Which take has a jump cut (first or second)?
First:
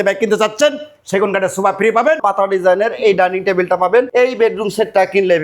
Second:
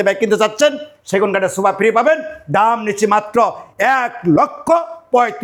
first